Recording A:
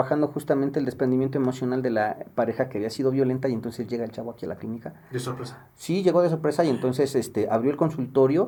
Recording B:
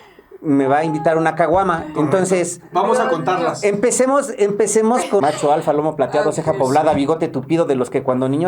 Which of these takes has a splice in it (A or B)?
B